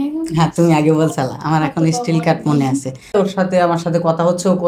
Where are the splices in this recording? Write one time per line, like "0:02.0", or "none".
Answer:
0:03.1